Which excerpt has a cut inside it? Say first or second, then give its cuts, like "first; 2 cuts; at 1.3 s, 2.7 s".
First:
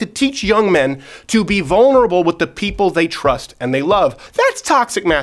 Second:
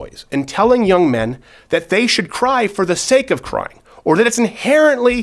first; 1 cut; at 4.2 s